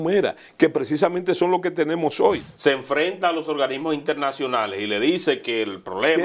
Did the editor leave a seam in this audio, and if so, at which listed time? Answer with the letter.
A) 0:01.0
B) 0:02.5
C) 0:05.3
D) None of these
B